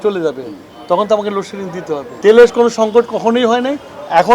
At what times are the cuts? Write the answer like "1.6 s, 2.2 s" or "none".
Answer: 2.1 s